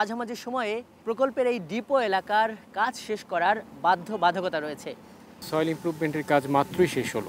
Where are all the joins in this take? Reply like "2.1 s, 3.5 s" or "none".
0.9 s, 5.5 s